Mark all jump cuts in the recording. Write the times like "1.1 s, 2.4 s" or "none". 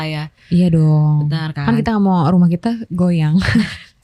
none